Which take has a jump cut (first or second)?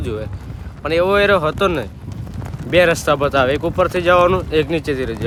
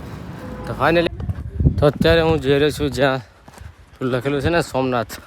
second